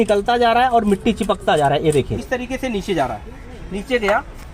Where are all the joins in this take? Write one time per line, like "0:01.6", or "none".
0:02.2